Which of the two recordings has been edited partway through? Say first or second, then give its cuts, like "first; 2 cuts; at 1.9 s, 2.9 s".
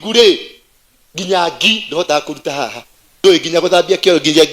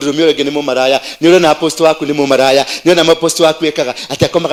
first; 1 cut; at 3.2 s